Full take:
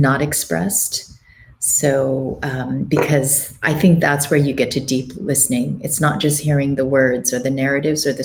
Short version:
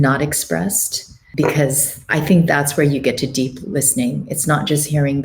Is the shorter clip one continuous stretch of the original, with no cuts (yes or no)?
no